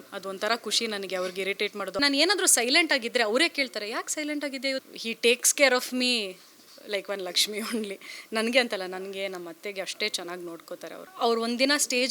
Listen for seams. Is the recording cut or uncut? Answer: cut